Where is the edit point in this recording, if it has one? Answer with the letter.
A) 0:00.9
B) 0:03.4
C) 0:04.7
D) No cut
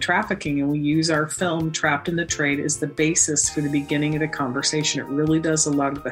D